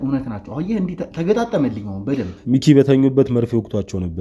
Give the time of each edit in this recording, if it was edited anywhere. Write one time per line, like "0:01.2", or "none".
0:02.4